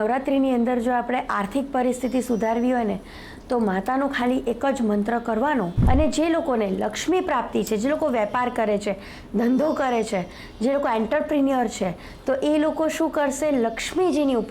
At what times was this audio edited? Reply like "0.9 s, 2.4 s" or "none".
5.8 s